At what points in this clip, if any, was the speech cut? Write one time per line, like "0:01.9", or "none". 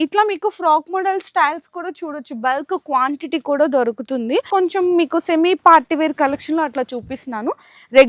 0:04.5